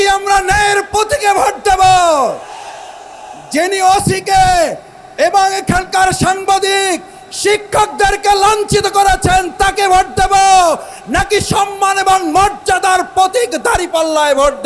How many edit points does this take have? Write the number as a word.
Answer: zero